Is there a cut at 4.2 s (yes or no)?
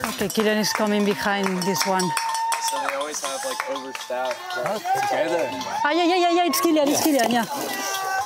no